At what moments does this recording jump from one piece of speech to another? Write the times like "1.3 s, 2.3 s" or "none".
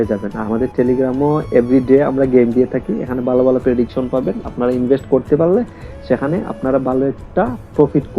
none